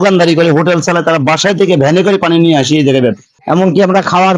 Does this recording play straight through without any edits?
no; 1 cut; at 3.3 s

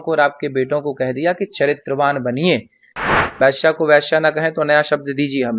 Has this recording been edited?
yes; 1 cut; at 3.1 s

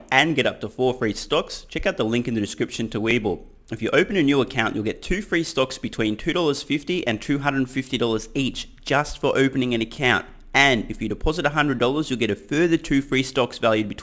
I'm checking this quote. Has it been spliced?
no; 0 cuts

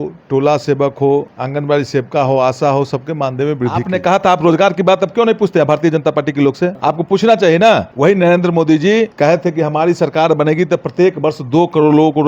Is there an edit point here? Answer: yes; 5 cuts; at 1.4 s, 3.8 s, 6.8 s, 7.9 s, 9.1 s

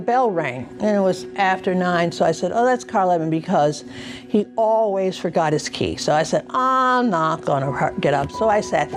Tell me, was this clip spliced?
no; 0 cuts

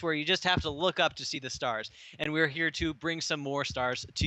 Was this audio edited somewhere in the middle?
yes; 1 cut; at 3.2 s

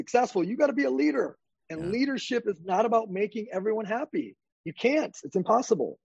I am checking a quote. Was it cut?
no; 0 cuts

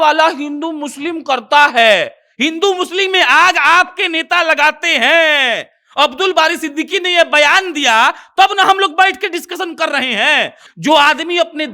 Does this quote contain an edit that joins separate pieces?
yes; 1 cut; at 10.6 s

